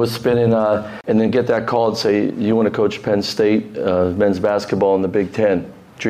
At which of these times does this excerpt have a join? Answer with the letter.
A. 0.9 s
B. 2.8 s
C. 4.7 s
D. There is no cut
A